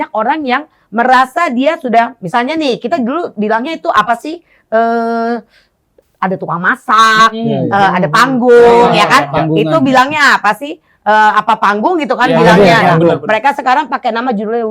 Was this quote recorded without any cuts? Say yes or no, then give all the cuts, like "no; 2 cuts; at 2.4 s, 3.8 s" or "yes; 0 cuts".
yes; 0 cuts